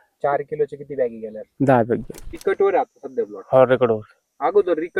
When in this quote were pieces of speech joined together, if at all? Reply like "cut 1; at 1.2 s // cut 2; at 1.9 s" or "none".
cut 1; at 1.4 s // cut 2; at 2.2 s